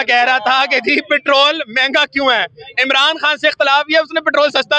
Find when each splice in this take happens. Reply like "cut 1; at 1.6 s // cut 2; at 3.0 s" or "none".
none